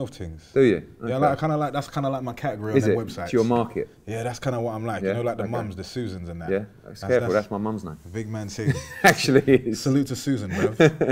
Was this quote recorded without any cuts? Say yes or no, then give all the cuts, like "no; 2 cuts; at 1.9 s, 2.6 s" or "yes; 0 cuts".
yes; 0 cuts